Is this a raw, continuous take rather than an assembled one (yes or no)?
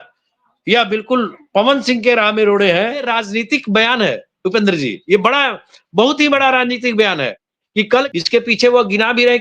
no